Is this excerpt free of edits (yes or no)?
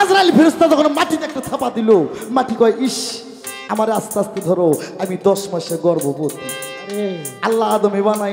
yes